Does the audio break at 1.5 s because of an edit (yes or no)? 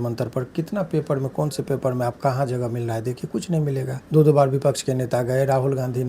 no